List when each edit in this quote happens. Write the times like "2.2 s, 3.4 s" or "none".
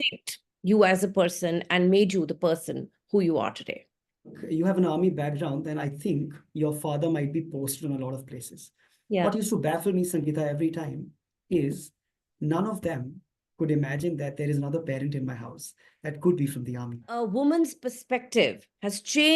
4.4 s, 17.1 s